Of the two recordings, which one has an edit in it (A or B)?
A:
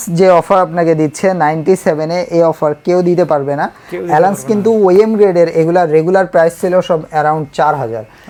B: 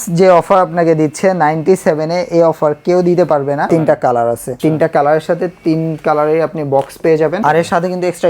B